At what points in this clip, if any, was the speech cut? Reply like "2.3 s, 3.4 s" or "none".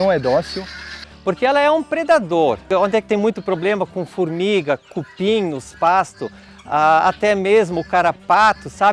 none